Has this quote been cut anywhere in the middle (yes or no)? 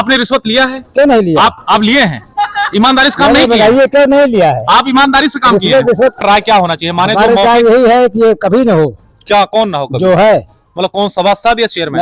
yes